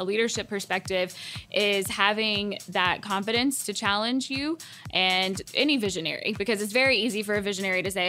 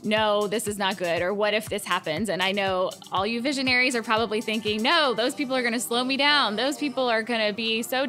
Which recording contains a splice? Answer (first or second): first